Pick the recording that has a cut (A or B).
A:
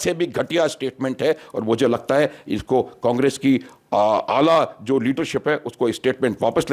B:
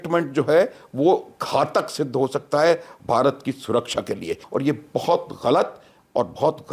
B